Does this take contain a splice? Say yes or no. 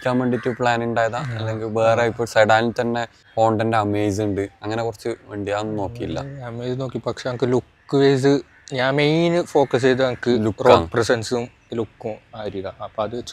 yes